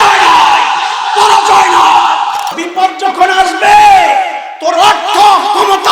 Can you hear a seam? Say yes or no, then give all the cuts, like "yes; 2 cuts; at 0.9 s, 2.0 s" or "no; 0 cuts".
yes; 1 cut; at 2.5 s